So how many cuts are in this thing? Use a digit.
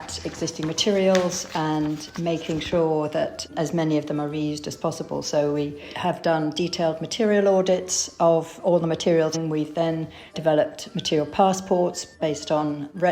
3